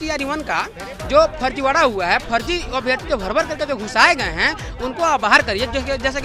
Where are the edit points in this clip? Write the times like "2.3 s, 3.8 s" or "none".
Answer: none